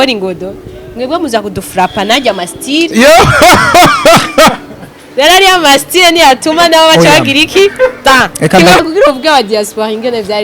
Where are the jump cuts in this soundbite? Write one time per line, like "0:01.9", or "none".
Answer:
0:08.9